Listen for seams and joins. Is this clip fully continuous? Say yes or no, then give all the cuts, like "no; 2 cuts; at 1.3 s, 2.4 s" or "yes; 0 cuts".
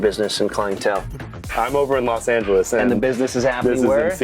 no; 1 cut; at 1.2 s